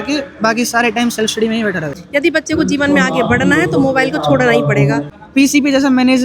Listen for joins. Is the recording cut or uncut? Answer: cut